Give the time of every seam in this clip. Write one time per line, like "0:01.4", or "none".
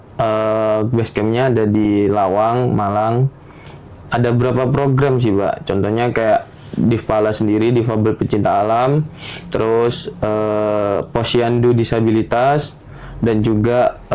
none